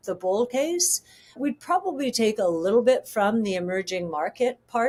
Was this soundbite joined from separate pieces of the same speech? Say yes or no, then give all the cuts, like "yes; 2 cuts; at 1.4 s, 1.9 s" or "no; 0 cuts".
no; 0 cuts